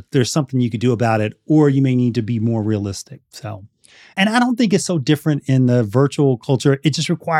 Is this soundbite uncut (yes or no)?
no